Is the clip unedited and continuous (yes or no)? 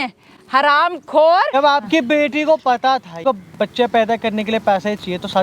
no